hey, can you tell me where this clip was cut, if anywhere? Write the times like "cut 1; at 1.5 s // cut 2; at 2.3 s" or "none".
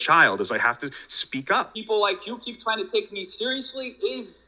cut 1; at 1.8 s